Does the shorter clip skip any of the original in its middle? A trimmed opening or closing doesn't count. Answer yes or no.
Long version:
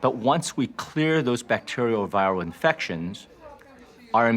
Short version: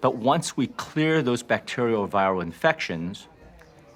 no